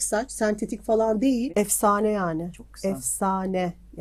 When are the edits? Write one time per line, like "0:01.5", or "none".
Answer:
0:01.5
0:02.6